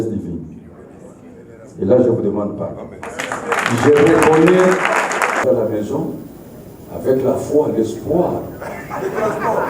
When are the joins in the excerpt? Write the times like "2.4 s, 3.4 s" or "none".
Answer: 5.4 s